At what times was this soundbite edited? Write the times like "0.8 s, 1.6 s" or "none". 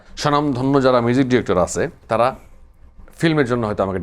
2.0 s